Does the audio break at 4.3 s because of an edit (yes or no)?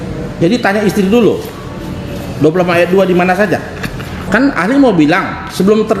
yes